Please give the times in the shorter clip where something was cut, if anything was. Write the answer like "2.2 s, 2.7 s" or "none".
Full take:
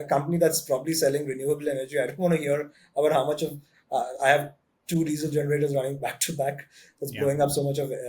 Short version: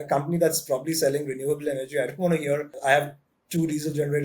2.7 s